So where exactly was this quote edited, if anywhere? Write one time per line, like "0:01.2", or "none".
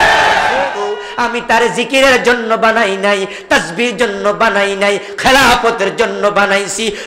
0:01.0

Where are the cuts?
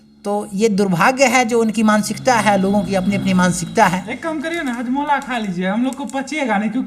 none

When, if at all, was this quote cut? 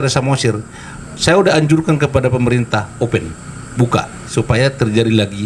0:04.2

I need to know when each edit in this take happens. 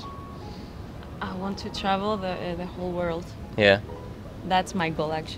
none

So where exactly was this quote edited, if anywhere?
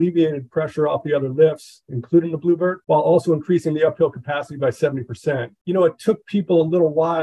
0:02.8

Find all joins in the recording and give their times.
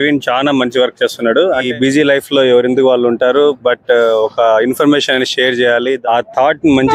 0:01.7
0:06.0

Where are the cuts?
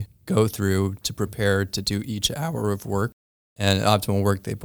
0:03.2

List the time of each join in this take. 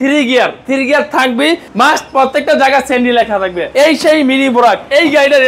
0:01.7
0:03.7

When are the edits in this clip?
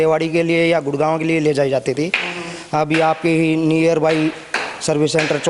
none

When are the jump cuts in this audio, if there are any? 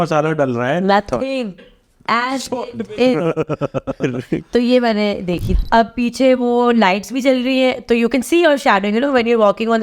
0:05.4

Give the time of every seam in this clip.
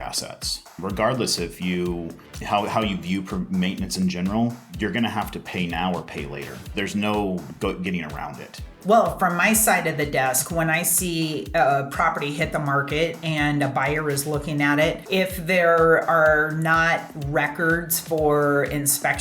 0:00.8
0:06.6
0:08.7
0:15.0

